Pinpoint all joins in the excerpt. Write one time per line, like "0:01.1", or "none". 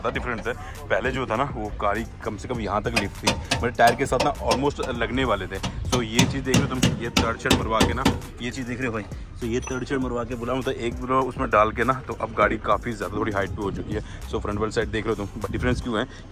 none